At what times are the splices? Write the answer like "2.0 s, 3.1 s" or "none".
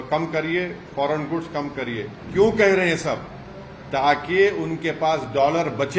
2.2 s

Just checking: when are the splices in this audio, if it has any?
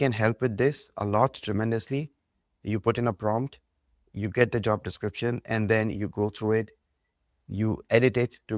none

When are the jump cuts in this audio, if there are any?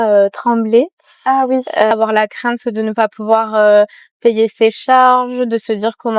1.9 s

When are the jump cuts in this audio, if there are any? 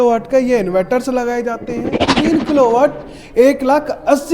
2.0 s

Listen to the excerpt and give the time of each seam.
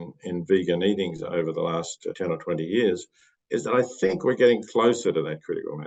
none

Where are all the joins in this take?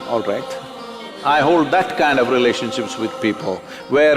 1.1 s

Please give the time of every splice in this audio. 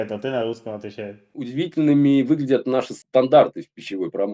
1.4 s

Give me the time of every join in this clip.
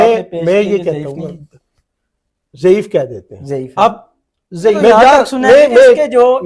4.8 s

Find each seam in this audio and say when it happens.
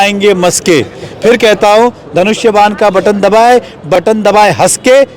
3.9 s

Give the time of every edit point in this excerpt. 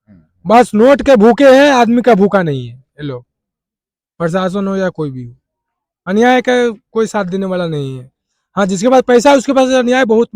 none

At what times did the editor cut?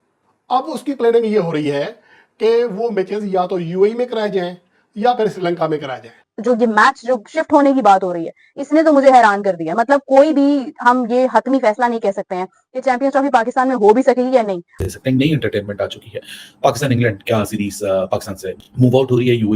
6.3 s, 14.8 s

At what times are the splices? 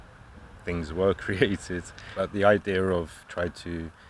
2.0 s

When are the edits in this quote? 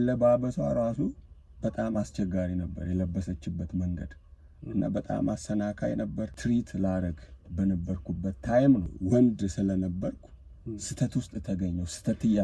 6.3 s, 8.9 s

